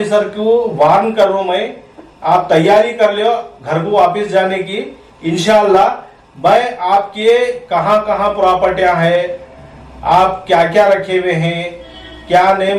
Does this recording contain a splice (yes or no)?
no